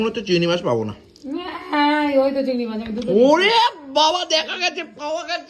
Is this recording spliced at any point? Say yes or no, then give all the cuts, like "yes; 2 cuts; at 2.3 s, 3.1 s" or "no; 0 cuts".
no; 0 cuts